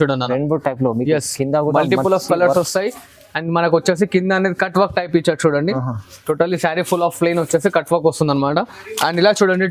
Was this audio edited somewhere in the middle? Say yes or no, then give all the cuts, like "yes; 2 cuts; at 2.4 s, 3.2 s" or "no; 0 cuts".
no; 0 cuts